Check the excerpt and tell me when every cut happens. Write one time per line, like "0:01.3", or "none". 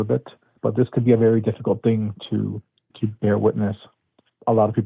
0:02.8